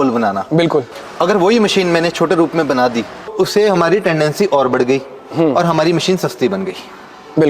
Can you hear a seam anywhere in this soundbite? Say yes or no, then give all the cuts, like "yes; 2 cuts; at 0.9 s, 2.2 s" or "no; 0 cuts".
yes; 2 cuts; at 0.9 s, 3.3 s